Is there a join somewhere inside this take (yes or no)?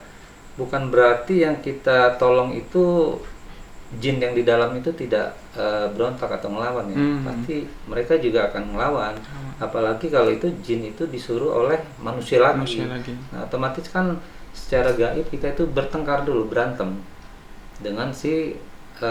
no